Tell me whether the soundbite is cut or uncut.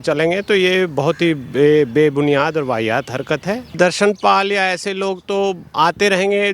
cut